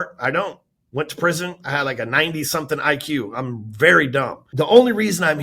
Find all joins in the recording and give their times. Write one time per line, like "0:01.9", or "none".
0:04.4

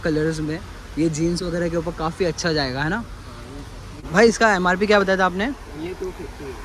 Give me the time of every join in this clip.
0:04.1

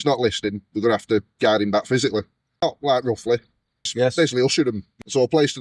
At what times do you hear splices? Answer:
none

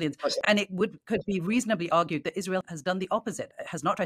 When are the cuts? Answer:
none

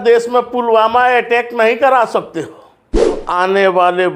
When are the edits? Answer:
0:03.2

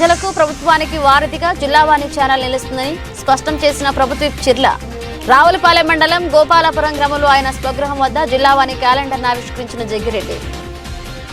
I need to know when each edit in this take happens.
0:10.3

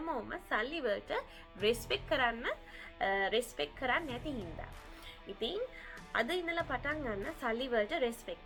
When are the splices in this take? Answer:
none

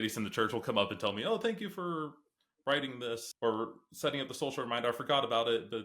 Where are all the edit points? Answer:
0:03.3

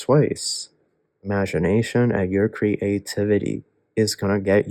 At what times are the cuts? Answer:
0:01.3

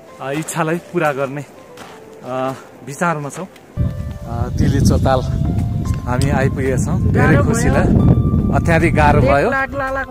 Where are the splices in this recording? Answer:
0:03.8

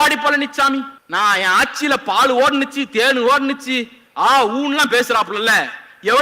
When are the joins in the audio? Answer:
0:01.0

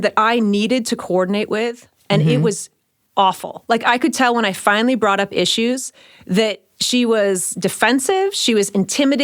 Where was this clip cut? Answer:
none

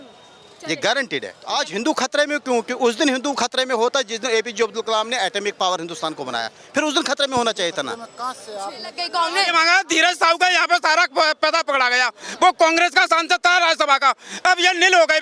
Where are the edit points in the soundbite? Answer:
0:01.4
0:09.0

